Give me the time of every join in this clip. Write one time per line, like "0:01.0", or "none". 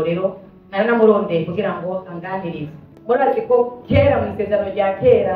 0:02.9

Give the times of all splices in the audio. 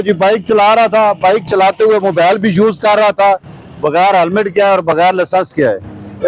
none

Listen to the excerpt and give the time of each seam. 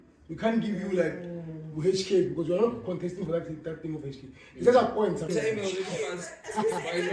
0:05.3

